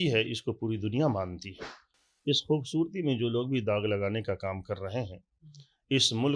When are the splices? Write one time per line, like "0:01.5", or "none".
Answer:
none

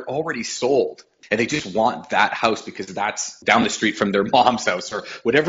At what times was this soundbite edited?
0:01.1
0:03.3

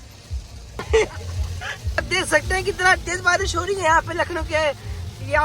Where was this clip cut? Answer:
0:00.8
0:01.8

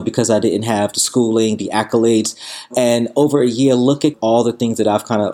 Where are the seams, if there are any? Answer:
0:02.7
0:04.2

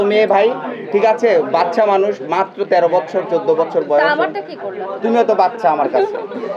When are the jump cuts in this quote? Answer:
none

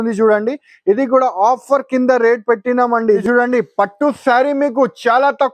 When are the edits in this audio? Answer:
0:03.2

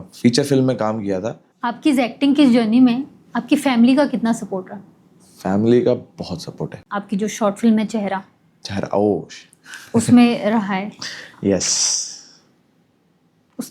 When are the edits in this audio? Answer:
0:01.5
0:06.9

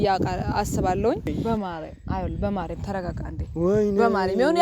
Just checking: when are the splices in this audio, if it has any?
0:01.4

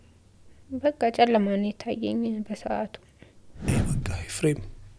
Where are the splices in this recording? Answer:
0:03.7

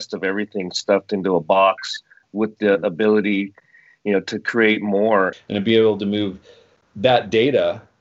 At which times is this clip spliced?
0:05.3

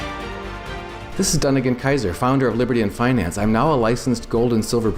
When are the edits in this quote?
0:01.0

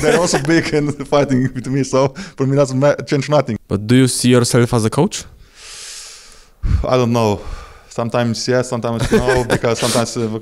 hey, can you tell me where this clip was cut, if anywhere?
0:03.6

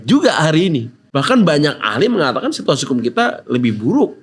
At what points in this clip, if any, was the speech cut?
0:01.0

